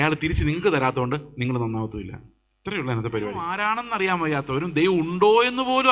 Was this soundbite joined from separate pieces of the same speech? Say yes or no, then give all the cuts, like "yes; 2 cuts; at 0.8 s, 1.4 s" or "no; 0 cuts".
yes; 1 cut; at 3.7 s